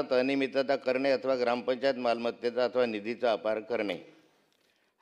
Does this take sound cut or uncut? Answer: uncut